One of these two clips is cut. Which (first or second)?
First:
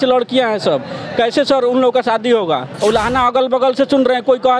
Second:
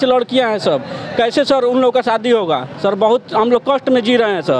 first